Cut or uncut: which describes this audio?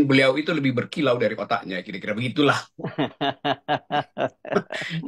cut